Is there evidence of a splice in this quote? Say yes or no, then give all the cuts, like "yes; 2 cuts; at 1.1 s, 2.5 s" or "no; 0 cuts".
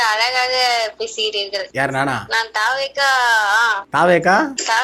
no; 0 cuts